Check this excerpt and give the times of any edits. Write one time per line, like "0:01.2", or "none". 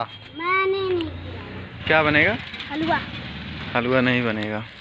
0:01.7